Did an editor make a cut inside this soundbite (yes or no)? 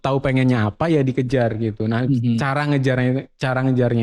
no